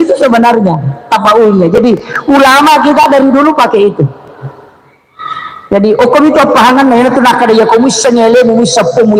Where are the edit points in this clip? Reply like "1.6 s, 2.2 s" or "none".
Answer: none